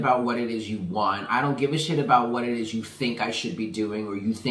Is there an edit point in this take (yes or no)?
no